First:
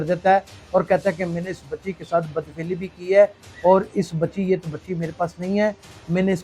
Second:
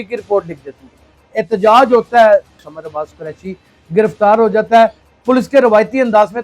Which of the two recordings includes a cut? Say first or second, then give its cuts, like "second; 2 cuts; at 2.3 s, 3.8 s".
second; 3 cuts; at 1.3 s, 2.5 s, 5.1 s